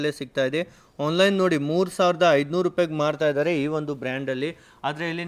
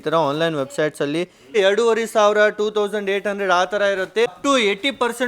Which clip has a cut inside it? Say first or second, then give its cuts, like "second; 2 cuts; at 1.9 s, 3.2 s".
second; 2 cuts; at 1.5 s, 4.4 s